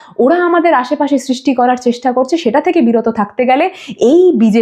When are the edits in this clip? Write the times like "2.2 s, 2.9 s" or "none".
none